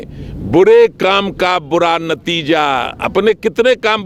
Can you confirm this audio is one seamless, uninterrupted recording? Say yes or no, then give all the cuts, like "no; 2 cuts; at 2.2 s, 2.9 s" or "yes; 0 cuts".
yes; 0 cuts